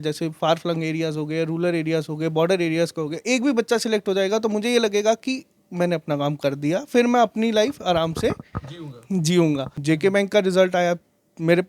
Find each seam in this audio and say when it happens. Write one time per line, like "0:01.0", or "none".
0:09.7